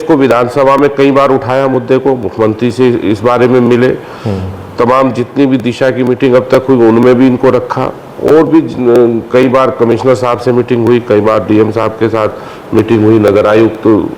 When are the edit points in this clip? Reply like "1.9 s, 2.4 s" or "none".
none